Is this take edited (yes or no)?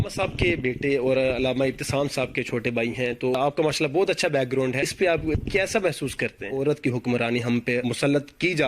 yes